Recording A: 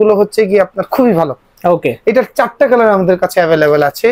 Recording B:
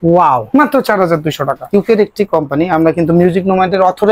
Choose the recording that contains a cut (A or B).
B